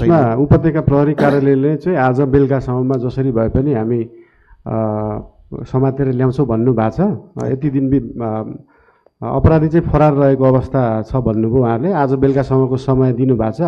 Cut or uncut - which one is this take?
uncut